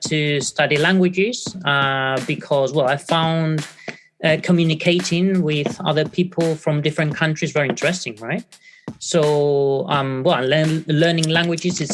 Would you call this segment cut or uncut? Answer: uncut